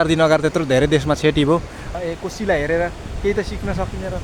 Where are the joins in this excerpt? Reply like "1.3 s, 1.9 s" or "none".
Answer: 1.8 s